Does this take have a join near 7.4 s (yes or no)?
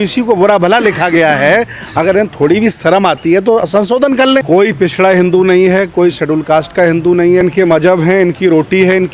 yes